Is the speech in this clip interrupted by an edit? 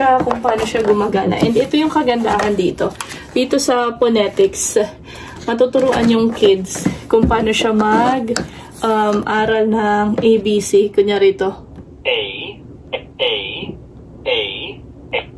no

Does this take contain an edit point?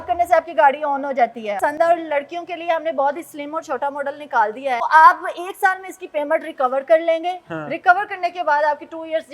yes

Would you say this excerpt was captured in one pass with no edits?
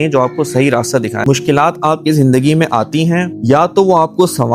no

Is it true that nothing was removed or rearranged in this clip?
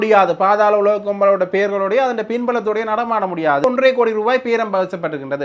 no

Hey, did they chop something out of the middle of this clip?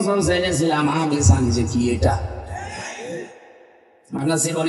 no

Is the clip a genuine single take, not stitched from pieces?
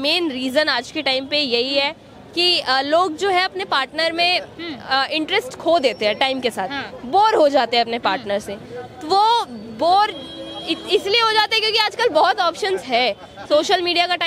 yes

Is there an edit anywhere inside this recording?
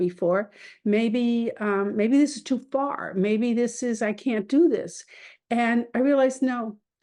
no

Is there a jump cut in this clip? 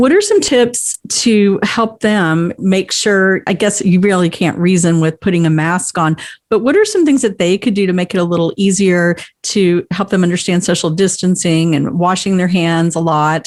no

